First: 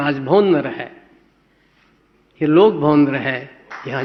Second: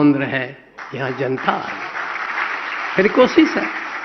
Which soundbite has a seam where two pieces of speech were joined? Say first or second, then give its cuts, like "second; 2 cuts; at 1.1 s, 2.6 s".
second; 1 cut; at 2.2 s